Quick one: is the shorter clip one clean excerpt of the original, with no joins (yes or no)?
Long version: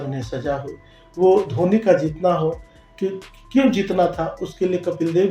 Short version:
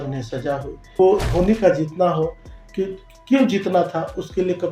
no